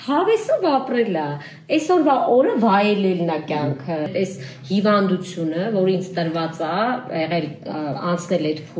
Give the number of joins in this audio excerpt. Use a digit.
1